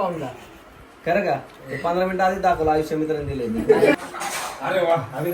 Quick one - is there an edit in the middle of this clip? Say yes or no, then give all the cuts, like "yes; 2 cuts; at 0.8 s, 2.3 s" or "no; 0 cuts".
yes; 1 cut; at 4.0 s